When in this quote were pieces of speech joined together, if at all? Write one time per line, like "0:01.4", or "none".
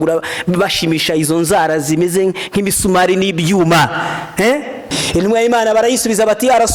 0:04.9